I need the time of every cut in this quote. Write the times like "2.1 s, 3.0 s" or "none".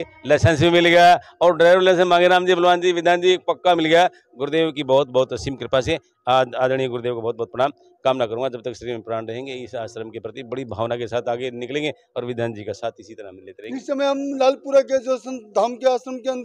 none